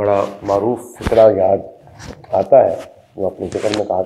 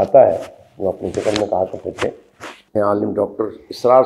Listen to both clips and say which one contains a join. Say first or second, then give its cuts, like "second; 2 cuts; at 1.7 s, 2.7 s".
second; 1 cut; at 2.7 s